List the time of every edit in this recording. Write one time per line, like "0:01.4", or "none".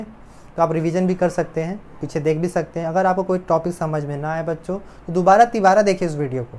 none